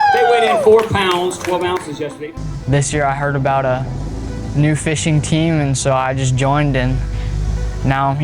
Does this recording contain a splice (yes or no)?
yes